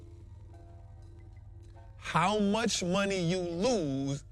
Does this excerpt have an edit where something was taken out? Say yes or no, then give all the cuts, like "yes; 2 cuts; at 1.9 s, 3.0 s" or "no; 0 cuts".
yes; 1 cut; at 1.5 s